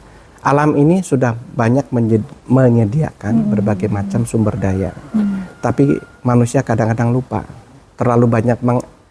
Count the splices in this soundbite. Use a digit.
0